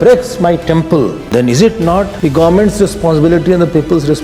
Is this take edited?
yes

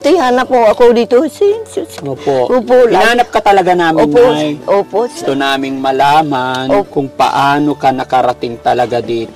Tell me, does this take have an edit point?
yes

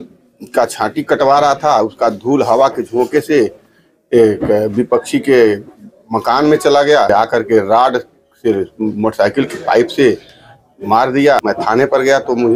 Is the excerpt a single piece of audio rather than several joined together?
no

